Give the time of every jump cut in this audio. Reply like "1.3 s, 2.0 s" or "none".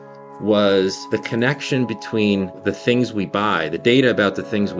1.0 s, 2.6 s